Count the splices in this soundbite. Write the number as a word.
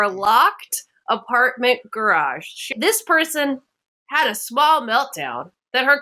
one